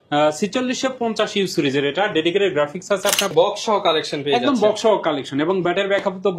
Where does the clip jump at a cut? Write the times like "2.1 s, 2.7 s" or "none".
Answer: 3.3 s